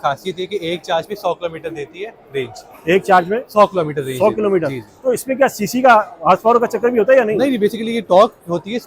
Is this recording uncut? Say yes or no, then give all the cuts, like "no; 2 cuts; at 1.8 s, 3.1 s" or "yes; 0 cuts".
yes; 0 cuts